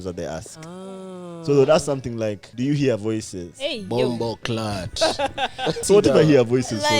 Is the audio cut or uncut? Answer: cut